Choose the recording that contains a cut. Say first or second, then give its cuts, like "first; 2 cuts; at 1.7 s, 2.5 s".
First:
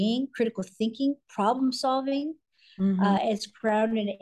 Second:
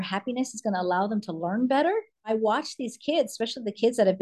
second; 1 cut; at 2.3 s